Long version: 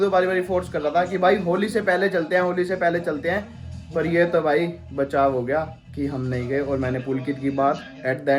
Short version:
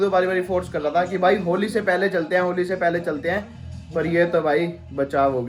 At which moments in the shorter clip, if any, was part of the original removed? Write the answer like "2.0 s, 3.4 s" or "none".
none